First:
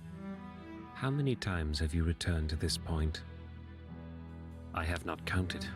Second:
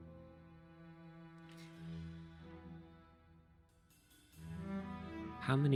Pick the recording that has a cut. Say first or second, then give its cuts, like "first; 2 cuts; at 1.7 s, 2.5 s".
first; 1 cut; at 3.4 s